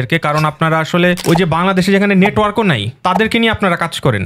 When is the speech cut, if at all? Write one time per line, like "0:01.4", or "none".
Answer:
0:01.2
0:02.9